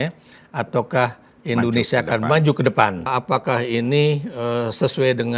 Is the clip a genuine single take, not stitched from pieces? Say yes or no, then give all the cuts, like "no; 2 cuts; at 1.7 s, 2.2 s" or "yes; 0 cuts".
no; 1 cut; at 3.1 s